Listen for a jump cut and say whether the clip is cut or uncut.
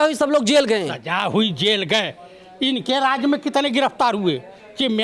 uncut